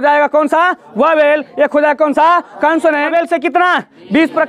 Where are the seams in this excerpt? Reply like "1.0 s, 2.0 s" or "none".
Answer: 3.1 s